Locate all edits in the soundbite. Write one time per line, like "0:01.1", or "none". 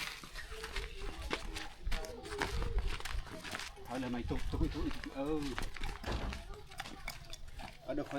none